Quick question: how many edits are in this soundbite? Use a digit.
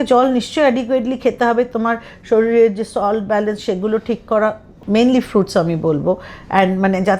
1